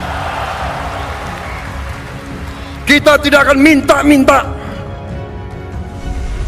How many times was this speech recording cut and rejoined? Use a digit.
0